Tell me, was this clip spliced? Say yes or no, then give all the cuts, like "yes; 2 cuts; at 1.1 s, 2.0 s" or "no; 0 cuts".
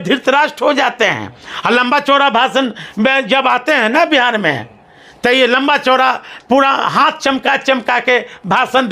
no; 0 cuts